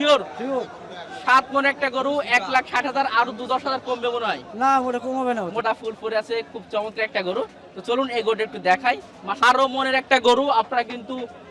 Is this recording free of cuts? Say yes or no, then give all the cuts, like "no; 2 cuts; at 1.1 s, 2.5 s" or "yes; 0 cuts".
no; 2 cuts; at 5.6 s, 9.4 s